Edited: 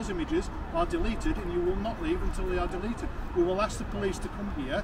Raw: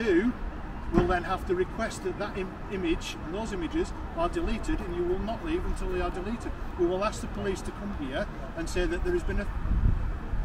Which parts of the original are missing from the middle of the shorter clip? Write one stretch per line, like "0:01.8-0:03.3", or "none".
none

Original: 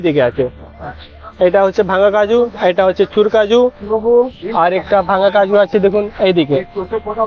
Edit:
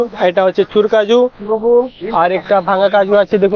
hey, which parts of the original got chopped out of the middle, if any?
none

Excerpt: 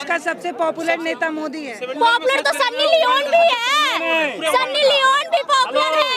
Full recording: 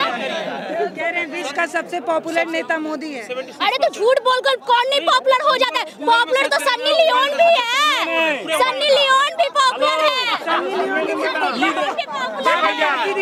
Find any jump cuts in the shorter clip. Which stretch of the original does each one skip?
0:03.3-0:05.9

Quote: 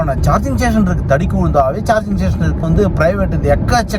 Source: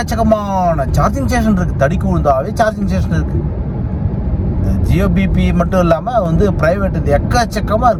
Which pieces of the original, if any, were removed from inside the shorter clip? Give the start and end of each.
0:03.3-0:06.3

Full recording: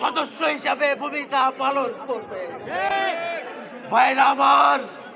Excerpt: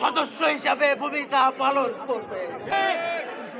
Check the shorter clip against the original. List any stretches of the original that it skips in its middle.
0:02.7-0:02.9

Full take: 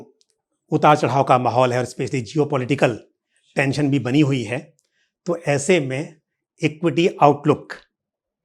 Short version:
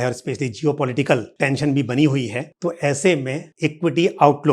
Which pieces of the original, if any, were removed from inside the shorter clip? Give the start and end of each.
0:03.0-0:03.5
0:04.6-0:05.1
0:06.1-0:06.4

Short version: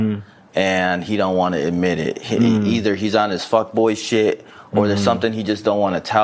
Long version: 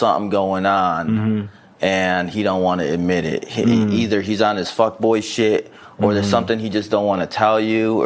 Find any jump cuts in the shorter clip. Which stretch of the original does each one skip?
none

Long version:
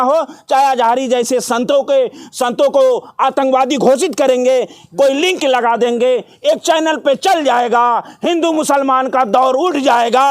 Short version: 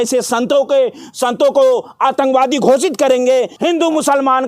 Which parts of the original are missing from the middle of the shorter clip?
0:04.7-0:08.2

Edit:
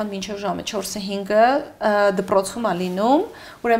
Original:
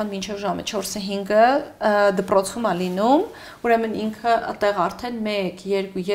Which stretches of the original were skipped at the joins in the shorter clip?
none

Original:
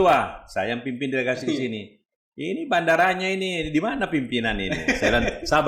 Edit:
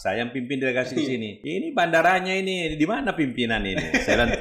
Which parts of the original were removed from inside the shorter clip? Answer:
0:01.9-0:02.3

